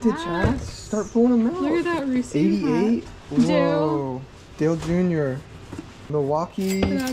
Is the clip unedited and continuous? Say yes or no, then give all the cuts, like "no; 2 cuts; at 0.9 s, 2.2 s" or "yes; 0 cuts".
no; 1 cut; at 6.1 s